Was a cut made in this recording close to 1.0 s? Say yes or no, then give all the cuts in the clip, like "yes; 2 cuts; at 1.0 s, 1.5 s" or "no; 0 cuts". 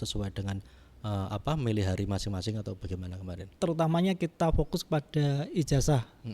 no; 1 cut; at 3.6 s